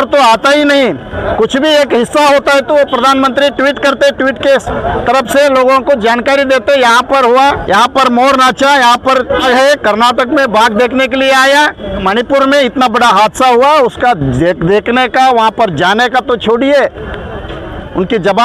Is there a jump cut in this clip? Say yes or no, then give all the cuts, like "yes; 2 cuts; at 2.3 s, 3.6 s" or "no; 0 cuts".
yes; 4 cuts; at 1.1 s, 7.6 s, 9.4 s, 12.0 s